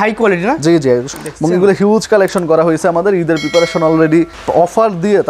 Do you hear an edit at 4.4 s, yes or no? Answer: yes